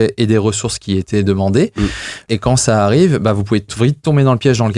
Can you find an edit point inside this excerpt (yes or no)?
yes